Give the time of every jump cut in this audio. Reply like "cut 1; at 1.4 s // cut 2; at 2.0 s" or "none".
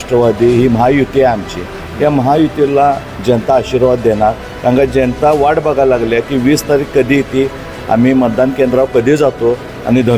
none